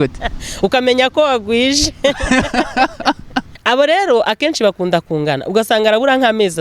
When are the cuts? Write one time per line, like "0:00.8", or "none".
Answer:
0:03.5